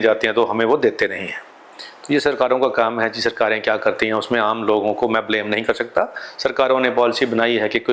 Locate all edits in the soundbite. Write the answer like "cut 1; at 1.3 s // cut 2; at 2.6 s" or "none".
none